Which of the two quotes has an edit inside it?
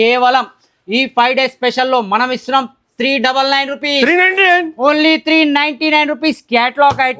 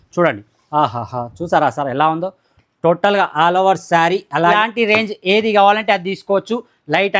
second; 1 cut; at 4.6 s

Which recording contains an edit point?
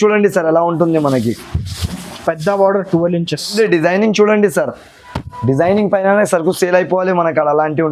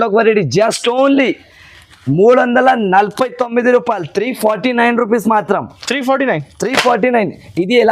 first; 1 cut; at 3.5 s

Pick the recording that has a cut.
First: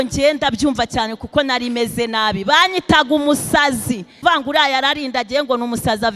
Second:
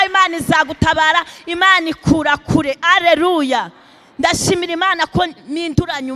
first; 1 cut; at 4.2 s

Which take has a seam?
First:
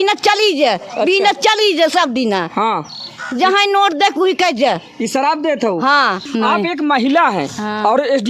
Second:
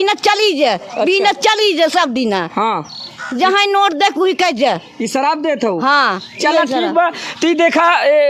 first; 1 cut; at 6.2 s

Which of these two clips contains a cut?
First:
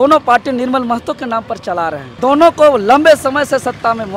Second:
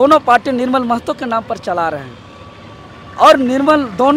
first; 1 cut; at 2.1 s

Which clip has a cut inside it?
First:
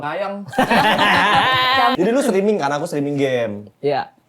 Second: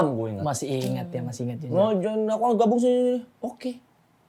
first; 1 cut; at 1.9 s

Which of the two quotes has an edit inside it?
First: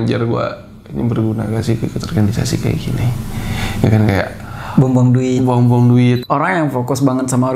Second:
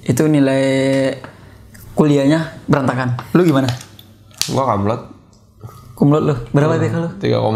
first; 1 cut; at 6.2 s

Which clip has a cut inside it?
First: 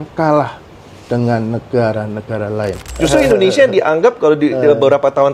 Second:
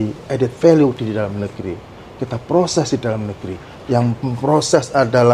first; 1 cut; at 2.8 s

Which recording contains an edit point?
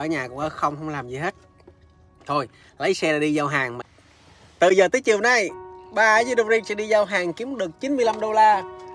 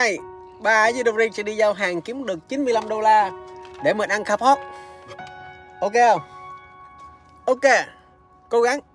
first; 1 cut; at 3.8 s

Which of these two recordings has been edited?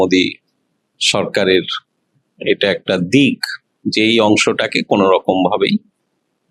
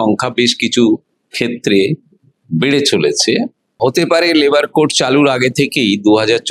second; 1 cut; at 3.8 s

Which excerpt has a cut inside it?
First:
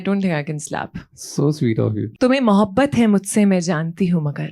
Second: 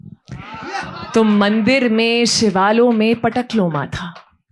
first; 1 cut; at 2.1 s

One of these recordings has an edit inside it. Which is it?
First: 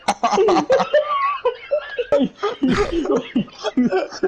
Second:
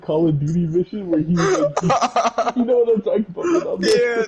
first; 1 cut; at 2.1 s

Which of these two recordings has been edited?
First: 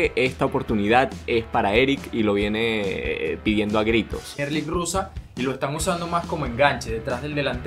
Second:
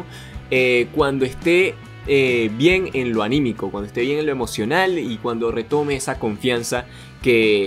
first; 1 cut; at 4.4 s

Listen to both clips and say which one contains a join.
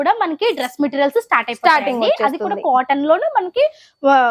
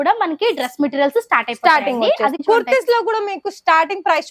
second; 1 cut; at 2.4 s

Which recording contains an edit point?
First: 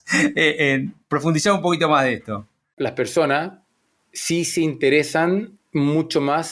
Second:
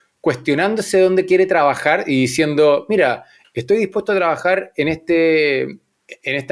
first; 1 cut; at 2.8 s

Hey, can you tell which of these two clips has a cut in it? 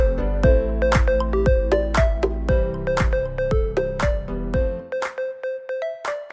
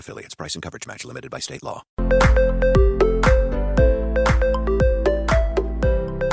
second; 1 cut; at 2.0 s

